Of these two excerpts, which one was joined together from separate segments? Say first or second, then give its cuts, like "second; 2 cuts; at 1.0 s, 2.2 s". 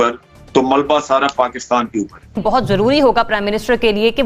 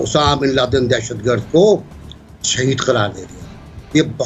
first; 1 cut; at 2.4 s